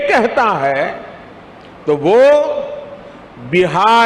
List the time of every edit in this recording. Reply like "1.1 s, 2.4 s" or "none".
none